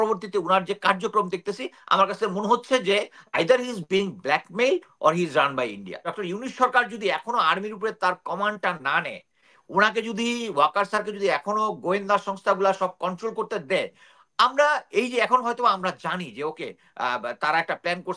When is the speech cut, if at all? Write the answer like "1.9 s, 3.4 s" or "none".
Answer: 6.1 s